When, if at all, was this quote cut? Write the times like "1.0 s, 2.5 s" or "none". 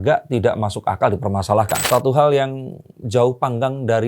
1.8 s